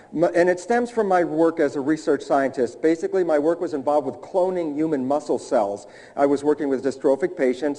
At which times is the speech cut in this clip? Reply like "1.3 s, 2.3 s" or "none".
2.5 s